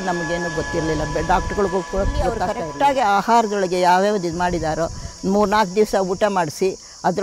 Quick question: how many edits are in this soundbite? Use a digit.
1